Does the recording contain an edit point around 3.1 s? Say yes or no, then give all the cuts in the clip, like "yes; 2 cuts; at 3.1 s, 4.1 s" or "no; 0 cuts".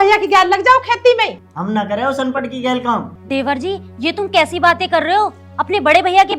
yes; 2 cuts; at 1.5 s, 3.1 s